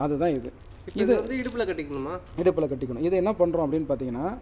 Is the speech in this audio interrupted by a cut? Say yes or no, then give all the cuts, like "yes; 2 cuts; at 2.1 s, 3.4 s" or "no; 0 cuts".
no; 0 cuts